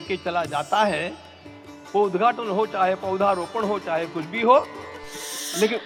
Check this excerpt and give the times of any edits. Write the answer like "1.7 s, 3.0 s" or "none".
none

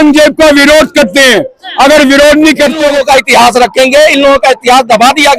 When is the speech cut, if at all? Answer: 2.8 s

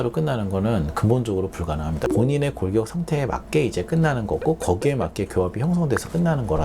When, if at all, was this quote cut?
2.0 s

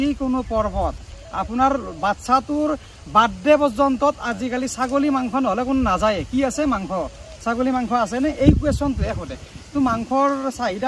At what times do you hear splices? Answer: none

